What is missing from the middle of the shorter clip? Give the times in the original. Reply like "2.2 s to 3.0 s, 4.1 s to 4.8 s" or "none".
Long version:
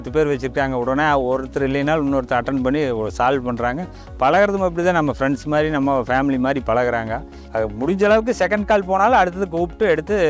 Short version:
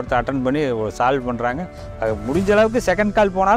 4.0 s to 7.3 s